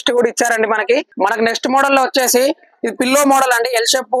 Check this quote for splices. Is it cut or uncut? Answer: cut